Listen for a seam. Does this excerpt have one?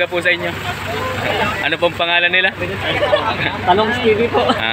no; 0 cuts

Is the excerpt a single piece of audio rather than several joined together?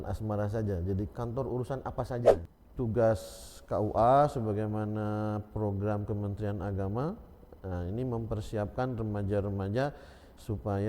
no; 1 cut; at 2.4 s

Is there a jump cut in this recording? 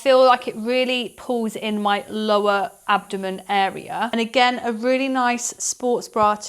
yes; 1 cut; at 4.1 s

